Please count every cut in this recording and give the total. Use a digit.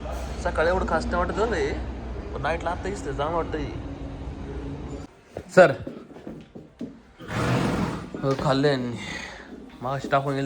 1